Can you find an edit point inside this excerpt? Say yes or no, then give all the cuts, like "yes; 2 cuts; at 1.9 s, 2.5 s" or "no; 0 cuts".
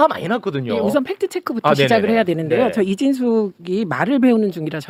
no; 0 cuts